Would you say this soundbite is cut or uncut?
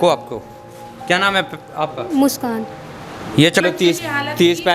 cut